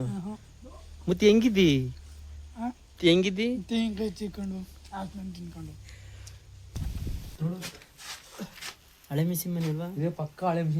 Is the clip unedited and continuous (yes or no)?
no